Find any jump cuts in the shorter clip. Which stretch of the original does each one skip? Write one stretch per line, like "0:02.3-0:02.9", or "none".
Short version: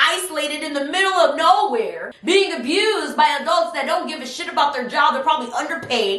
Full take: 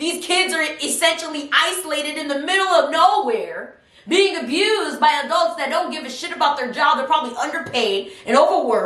0:03.6-0:03.9